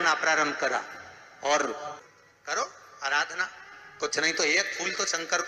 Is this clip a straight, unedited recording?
no; 1 cut; at 1.9 s

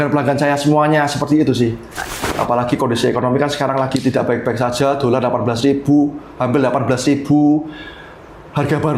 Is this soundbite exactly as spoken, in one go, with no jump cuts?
no; 1 cut; at 2.1 s

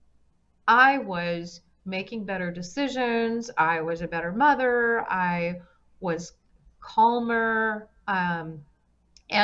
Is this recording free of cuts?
yes; 0 cuts

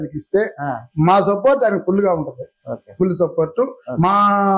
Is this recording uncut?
yes; 0 cuts

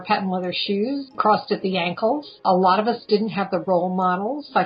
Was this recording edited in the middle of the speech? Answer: yes; 2 cuts; at 1.1 s, 2.4 s

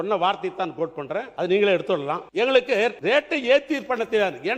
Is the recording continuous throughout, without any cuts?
no; 3 cuts; at 1.3 s, 2.2 s, 3.0 s

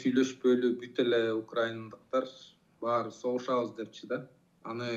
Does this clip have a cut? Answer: no; 0 cuts

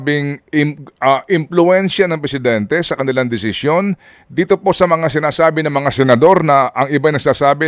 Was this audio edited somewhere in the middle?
no; 0 cuts

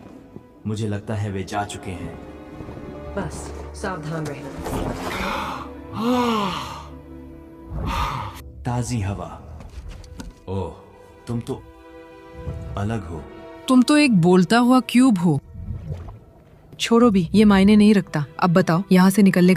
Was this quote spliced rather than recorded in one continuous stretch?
no; 0 cuts

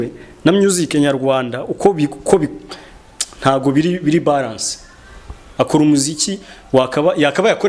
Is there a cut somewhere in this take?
no; 0 cuts

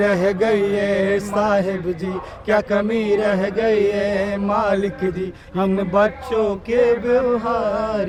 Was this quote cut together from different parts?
no; 0 cuts

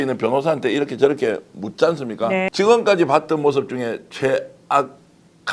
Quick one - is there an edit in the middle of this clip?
yes; 1 cut; at 2.5 s

